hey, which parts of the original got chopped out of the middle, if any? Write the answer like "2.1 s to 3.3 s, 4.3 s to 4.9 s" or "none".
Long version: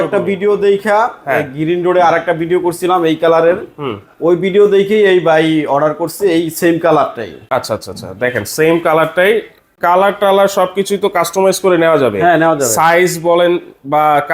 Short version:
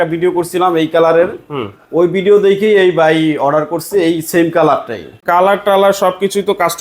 7.3 s to 9.6 s